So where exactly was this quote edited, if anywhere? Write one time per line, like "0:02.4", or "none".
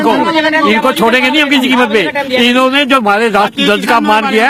none